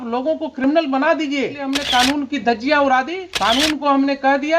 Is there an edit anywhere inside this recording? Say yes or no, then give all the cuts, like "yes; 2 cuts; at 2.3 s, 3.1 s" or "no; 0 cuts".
yes; 2 cuts; at 1.7 s, 3.2 s